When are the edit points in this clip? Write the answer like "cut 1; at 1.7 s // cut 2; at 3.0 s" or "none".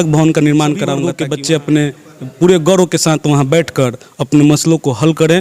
cut 1; at 1.1 s